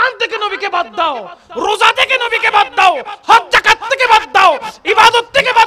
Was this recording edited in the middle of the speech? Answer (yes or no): no